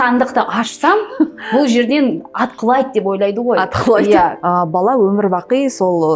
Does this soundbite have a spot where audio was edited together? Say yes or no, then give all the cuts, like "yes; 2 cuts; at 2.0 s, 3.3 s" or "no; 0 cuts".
yes; 1 cut; at 4.3 s